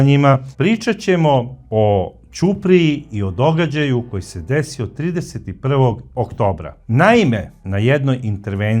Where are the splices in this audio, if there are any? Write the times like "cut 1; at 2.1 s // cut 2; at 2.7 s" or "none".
none